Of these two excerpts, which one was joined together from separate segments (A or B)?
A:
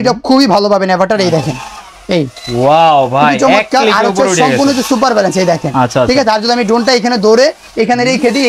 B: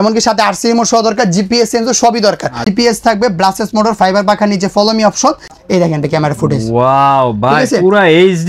B